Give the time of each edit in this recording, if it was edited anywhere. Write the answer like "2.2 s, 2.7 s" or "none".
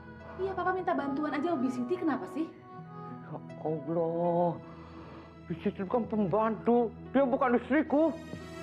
none

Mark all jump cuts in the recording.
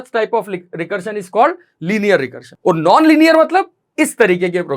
2.4 s

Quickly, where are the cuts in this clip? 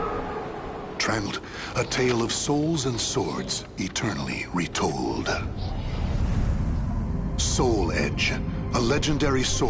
1.3 s

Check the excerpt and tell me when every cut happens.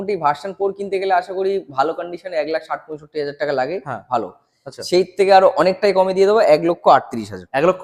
none

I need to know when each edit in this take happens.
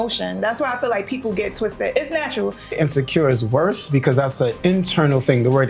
2.7 s

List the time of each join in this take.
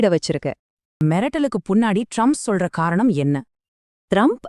1.0 s

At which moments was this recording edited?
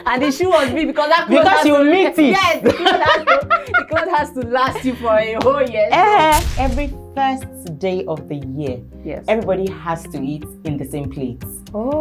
6.5 s

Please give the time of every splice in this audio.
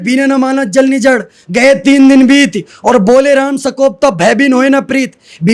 none

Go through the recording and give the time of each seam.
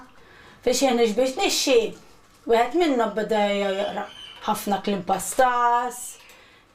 none

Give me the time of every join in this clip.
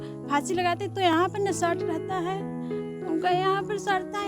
none

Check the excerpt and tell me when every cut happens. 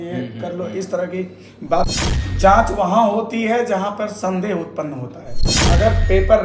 1.9 s, 5.5 s

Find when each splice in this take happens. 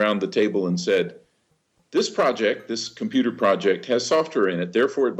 none

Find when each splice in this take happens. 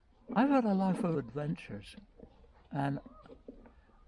1.1 s

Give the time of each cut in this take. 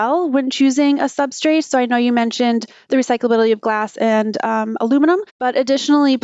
none

